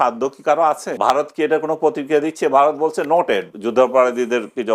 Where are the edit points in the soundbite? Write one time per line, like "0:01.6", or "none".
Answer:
0:00.9
0:03.6

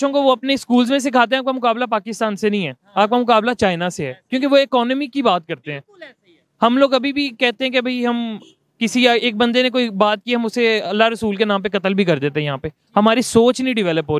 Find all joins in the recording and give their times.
none

